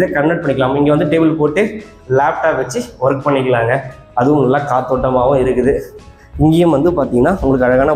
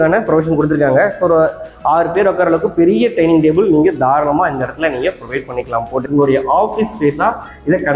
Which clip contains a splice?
second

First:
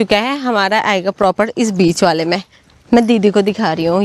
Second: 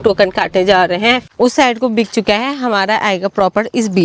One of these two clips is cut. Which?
second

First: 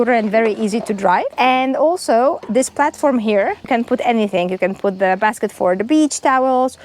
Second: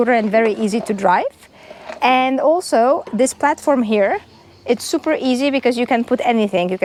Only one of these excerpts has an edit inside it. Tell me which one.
first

